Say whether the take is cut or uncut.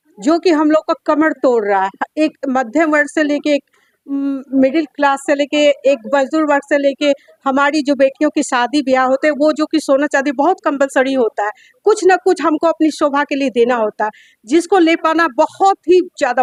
uncut